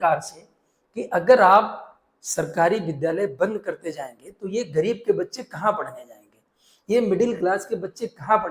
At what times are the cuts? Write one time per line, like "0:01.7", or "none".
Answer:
none